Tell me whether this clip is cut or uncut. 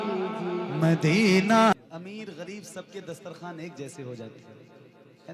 cut